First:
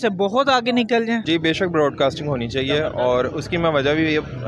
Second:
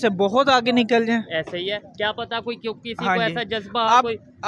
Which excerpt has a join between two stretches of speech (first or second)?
first